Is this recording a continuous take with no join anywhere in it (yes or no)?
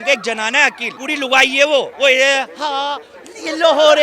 no